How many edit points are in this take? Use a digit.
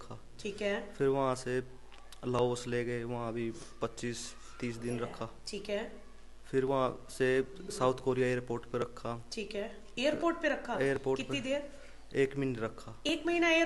0